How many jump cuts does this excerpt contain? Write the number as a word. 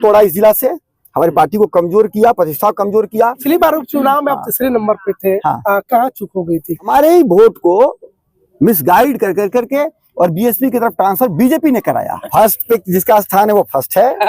three